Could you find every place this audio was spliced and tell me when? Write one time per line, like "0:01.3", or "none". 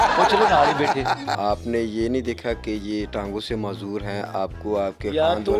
0:01.3

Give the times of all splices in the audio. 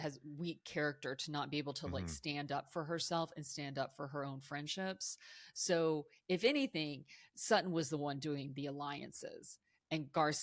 none

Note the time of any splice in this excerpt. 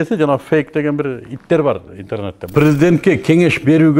0:02.4

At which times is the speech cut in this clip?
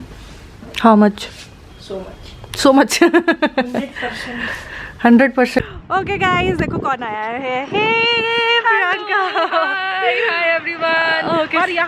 0:05.6

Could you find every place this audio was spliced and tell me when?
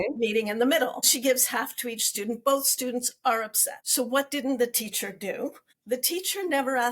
0:01.1
0:05.7

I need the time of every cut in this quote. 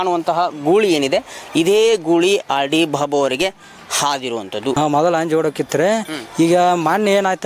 0:04.8

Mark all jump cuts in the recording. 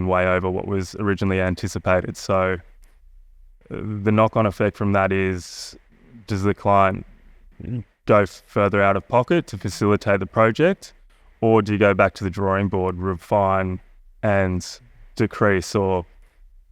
0:10.3

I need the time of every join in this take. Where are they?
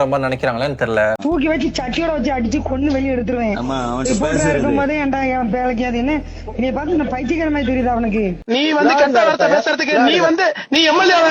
0:01.2
0:08.4

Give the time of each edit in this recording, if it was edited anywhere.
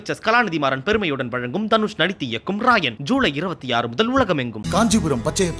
none

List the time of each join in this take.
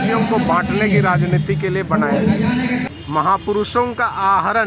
0:02.9

